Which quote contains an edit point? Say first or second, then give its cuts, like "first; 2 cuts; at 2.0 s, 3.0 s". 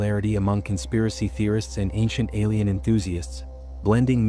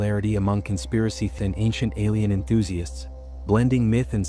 second; 1 cut; at 1.3 s